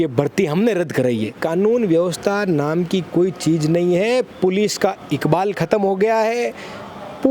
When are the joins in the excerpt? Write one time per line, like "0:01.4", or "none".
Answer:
0:01.4